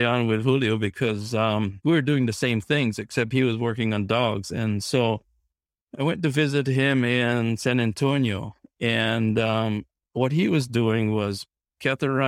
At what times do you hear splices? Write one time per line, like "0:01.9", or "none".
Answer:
none